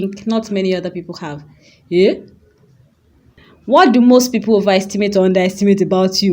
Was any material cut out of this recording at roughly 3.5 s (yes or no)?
yes